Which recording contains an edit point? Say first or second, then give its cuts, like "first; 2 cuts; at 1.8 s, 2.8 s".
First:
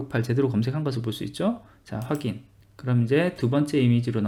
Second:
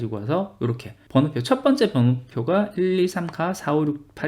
second; 1 cut; at 0.9 s